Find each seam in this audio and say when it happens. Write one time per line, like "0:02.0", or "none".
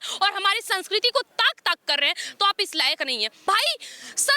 0:03.3